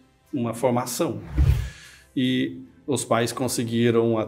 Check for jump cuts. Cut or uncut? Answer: cut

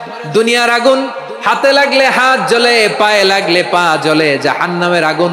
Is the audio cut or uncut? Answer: uncut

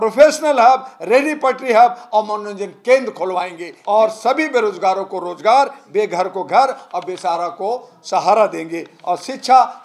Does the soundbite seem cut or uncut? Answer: cut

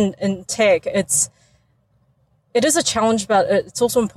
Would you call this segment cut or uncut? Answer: uncut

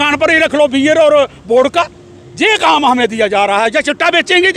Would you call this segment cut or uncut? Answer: uncut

